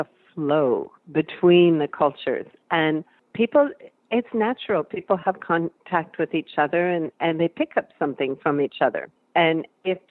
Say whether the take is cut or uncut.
cut